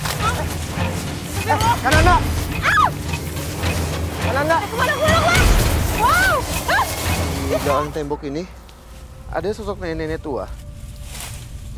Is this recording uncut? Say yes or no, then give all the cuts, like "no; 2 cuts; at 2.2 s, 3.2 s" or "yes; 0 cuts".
no; 1 cut; at 7.6 s